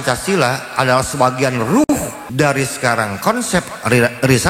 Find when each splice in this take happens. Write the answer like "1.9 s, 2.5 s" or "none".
1.8 s